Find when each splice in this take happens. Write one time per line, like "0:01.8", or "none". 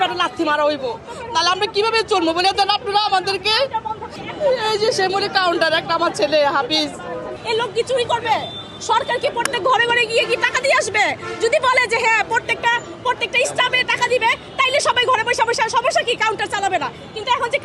0:04.2
0:07.4